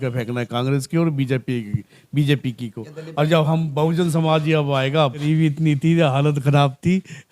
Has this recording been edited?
yes; 1 cut; at 5.2 s

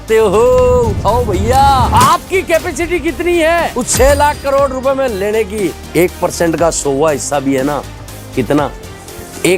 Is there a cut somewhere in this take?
no; 0 cuts

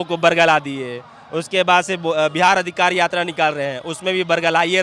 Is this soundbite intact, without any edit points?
yes; 0 cuts

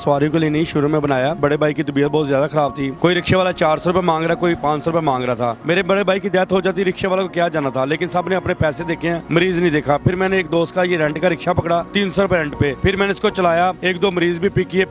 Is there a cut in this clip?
yes; 4 cuts; at 1.4 s, 3.0 s, 5.6 s, 10.0 s

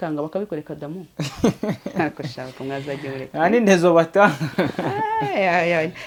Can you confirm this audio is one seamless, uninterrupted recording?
yes; 0 cuts

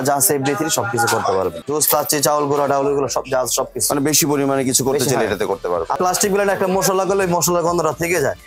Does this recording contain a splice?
yes; 2 cuts; at 1.6 s, 6.0 s

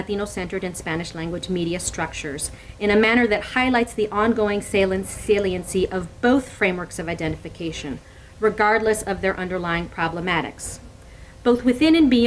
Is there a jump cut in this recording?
yes; 1 cut; at 4.1 s

